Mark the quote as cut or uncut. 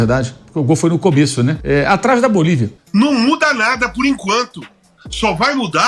cut